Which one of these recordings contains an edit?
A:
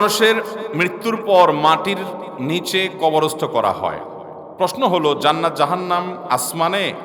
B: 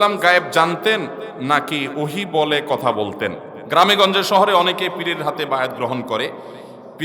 B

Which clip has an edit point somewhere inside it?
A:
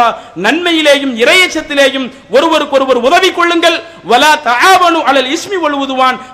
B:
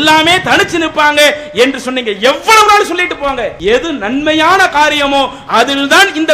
B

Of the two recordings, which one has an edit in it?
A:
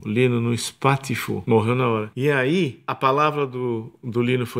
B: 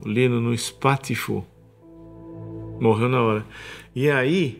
A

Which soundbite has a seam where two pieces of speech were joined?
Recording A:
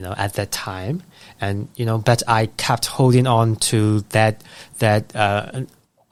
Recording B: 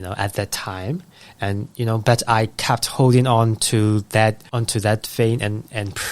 B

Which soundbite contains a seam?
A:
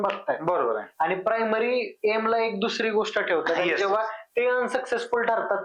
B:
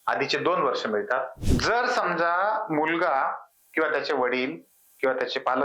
B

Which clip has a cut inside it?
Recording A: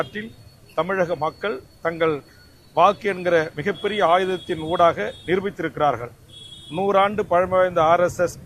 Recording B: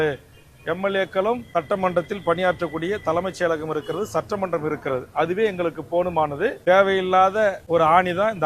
B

